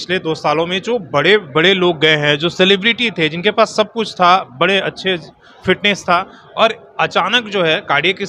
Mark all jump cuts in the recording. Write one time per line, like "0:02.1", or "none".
none